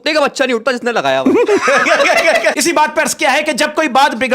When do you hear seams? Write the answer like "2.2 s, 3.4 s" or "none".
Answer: 2.6 s